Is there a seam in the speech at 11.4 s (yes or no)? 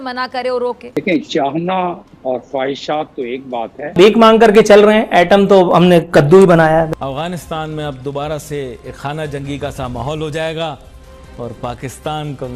no